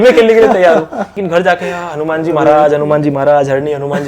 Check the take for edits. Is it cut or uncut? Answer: cut